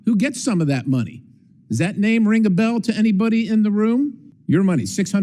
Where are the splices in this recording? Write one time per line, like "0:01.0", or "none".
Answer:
0:04.3